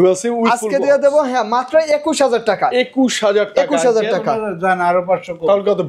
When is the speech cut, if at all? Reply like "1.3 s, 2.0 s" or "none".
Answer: none